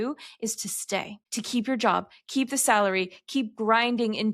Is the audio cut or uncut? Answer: cut